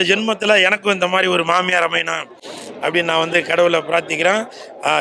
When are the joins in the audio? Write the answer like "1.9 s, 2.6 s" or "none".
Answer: none